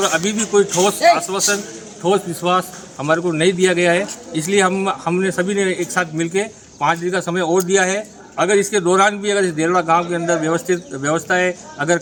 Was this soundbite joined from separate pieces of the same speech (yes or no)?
no